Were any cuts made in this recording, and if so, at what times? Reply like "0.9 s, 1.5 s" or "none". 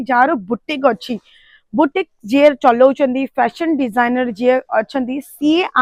none

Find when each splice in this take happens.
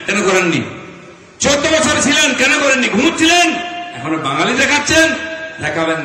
none

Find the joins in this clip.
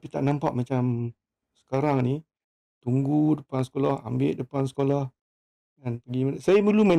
none

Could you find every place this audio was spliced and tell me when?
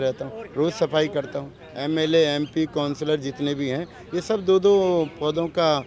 1.7 s

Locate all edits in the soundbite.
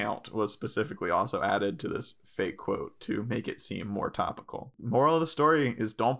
4.7 s

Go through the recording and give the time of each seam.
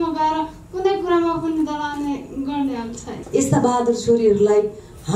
3.2 s

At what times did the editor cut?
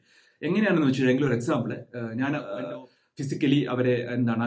2.5 s

